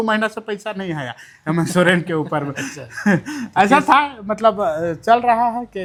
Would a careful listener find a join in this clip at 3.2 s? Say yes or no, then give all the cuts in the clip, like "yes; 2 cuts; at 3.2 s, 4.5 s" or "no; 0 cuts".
no; 0 cuts